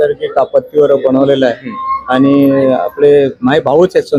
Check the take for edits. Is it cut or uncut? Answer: uncut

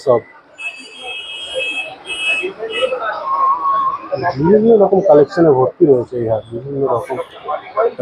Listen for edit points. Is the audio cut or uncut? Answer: uncut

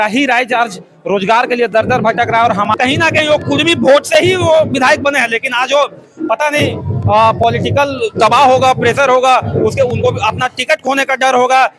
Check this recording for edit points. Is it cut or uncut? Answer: cut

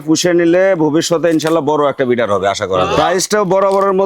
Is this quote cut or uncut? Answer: cut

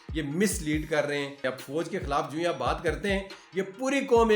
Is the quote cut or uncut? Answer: cut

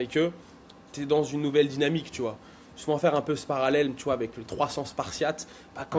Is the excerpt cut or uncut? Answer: uncut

